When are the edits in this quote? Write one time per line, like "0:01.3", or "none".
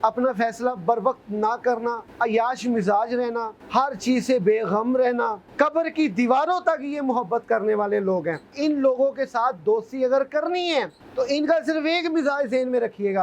0:02.1
0:03.6
0:05.4
0:08.5
0:11.0